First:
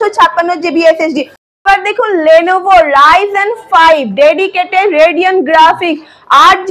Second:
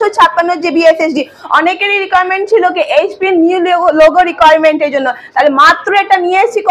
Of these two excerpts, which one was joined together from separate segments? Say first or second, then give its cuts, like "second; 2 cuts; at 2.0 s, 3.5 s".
first; 1 cut; at 1.6 s